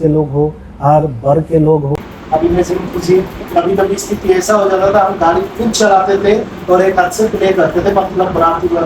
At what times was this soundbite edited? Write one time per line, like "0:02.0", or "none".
0:01.9